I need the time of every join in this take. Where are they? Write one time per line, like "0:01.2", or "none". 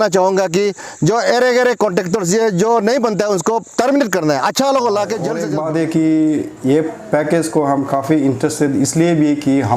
0:05.4